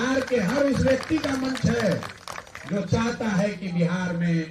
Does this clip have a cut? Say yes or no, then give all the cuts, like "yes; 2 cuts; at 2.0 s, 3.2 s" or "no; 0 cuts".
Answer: no; 0 cuts